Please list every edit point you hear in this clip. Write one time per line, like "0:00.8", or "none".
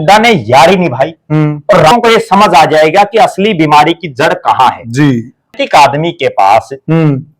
0:01.9
0:05.5